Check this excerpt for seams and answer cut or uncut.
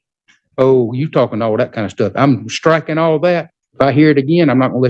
cut